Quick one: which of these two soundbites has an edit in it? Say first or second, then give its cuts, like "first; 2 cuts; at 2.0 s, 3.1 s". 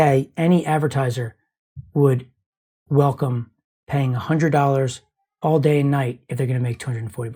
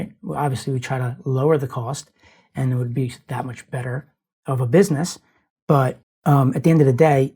second; 1 cut; at 6.1 s